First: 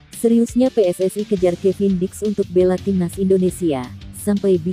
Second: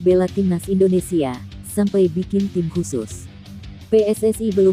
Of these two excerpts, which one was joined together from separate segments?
second; 1 cut; at 3.7 s

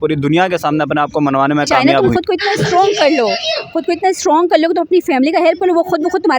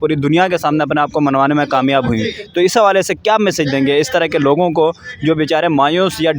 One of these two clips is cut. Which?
first; 1 cut; at 1.8 s

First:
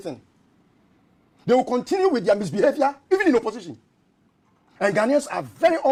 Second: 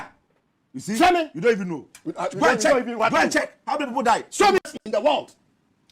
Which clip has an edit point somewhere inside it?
second; 1 cut; at 4.6 s

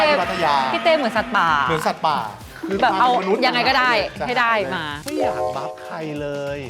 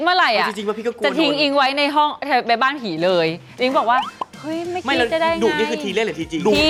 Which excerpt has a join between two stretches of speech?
first; 1 cut; at 4.9 s

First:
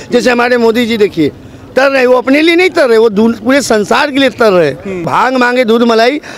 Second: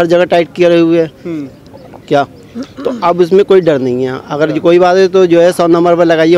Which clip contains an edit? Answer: first; 1 cut; at 5.1 s

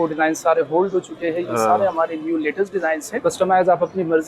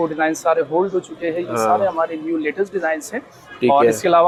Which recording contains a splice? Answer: first; 1 cut; at 3.1 s

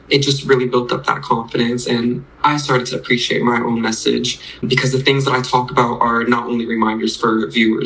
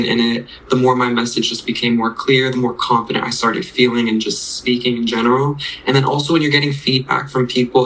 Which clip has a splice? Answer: first; 1 cut; at 4.6 s

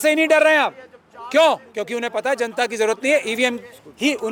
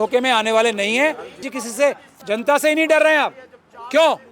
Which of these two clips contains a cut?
second; 1 cut; at 1.5 s

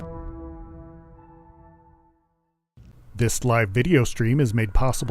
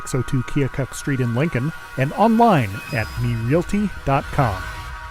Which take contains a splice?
first; 1 cut; at 3.0 s

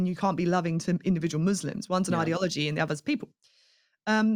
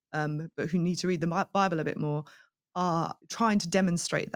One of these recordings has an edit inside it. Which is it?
second; 1 cut; at 3.2 s

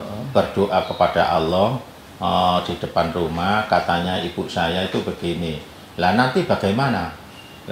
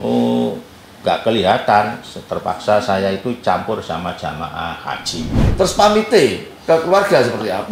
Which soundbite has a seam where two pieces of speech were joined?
second; 1 cut; at 5.4 s

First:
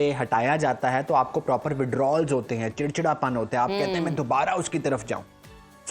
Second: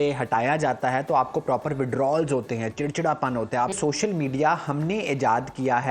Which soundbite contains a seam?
second; 1 cut; at 3.7 s

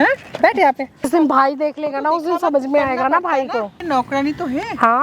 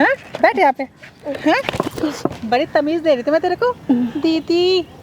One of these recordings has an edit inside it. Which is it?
first; 2 cuts; at 1.1 s, 3.8 s

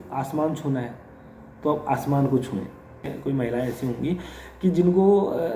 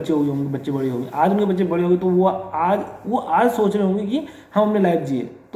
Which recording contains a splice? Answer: first; 1 cut; at 3.1 s

